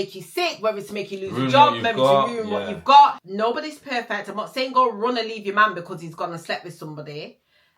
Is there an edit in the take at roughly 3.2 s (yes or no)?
yes